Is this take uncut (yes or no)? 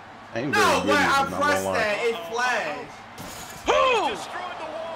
yes